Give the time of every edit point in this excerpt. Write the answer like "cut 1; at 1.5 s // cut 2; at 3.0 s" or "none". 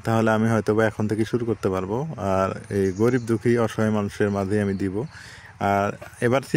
none